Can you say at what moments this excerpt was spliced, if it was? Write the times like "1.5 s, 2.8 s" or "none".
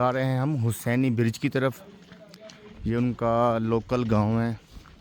none